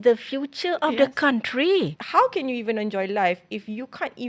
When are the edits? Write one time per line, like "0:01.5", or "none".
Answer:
0:02.0